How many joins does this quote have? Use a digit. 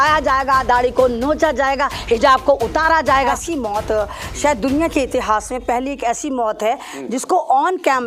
1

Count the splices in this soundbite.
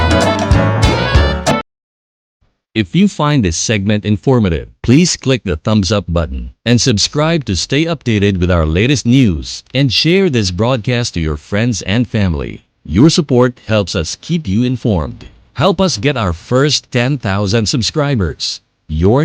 1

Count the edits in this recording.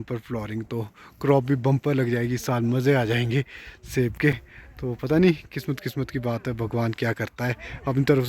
0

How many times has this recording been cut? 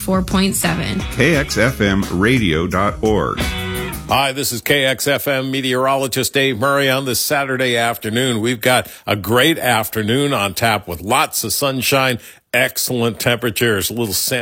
1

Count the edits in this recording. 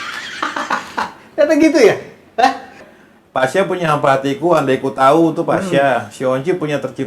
1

